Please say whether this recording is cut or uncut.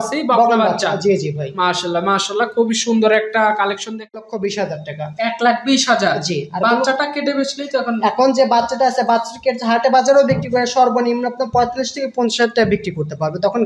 cut